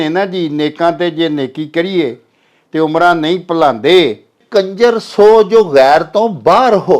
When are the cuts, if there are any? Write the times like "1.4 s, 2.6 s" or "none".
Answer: 4.4 s